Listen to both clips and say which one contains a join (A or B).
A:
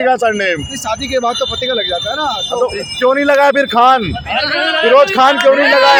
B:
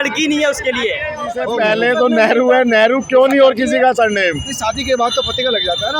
B